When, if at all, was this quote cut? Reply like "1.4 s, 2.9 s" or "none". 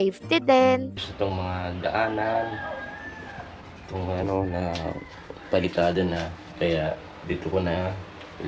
1.0 s